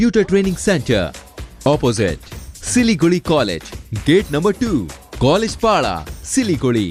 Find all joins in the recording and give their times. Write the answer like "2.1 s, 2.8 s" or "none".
none